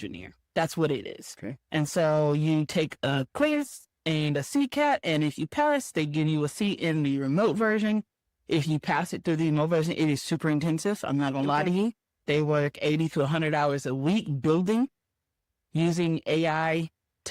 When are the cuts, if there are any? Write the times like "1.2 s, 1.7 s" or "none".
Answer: none